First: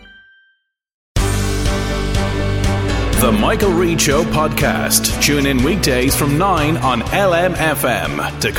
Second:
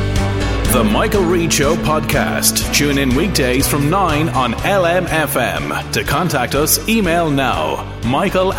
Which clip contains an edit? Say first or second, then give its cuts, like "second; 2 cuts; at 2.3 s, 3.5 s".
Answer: first; 1 cut; at 1.0 s